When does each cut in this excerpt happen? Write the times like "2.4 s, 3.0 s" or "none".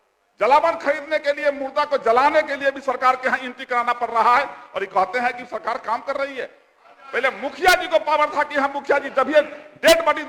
none